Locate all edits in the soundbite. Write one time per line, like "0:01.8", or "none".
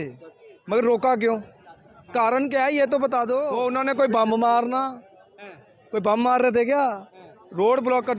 0:03.5